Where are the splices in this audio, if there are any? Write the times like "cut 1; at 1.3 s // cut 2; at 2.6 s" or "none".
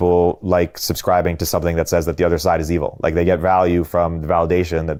none